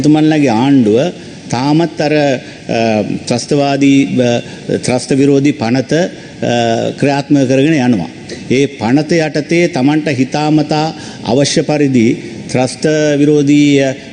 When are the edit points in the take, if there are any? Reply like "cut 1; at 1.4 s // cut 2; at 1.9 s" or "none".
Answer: none